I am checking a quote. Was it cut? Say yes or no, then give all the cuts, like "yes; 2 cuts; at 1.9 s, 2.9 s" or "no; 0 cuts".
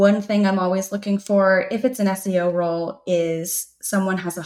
no; 0 cuts